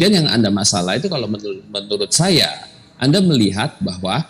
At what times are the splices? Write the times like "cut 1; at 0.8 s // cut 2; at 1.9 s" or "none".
none